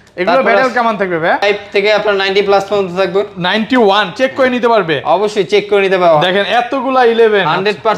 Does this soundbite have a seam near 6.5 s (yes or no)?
no